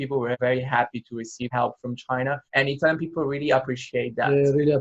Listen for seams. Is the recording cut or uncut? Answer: cut